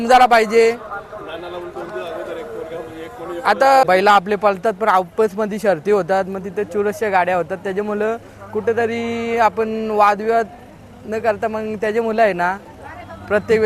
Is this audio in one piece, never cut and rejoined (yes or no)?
no